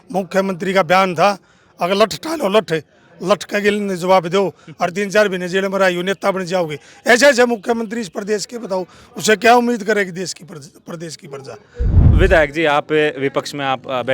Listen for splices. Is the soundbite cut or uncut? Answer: cut